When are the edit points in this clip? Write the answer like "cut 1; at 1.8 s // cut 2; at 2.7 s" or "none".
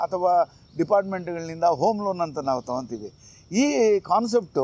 none

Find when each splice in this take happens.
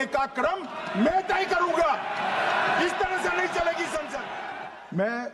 cut 1; at 4.3 s

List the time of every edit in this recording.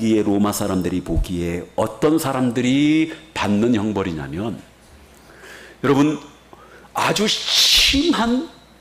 none

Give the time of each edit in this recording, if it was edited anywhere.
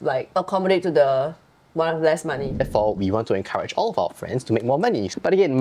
cut 1; at 2.5 s

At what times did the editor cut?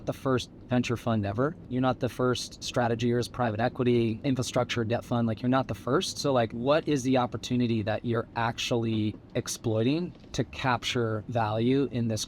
cut 1; at 1.6 s // cut 2; at 2.5 s // cut 3; at 4.2 s // cut 4; at 6.5 s

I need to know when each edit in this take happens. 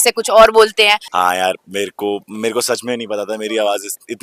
cut 1; at 1.1 s

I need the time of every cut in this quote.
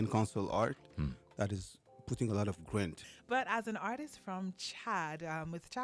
cut 1; at 3.1 s

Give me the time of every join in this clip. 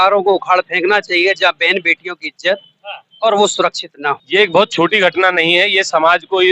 cut 1; at 4.2 s

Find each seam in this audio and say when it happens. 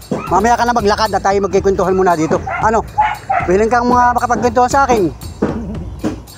none

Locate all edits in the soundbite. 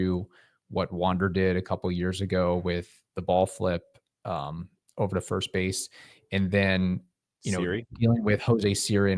none

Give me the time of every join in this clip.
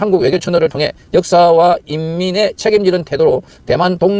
none

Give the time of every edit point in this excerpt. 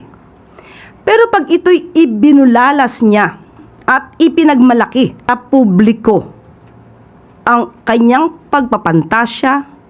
cut 1; at 5.3 s

